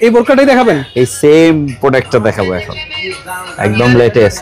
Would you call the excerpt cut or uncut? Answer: uncut